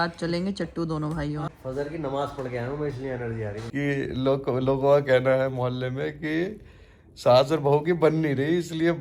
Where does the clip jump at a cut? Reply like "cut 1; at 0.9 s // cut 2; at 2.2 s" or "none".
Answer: cut 1; at 1.5 s // cut 2; at 3.6 s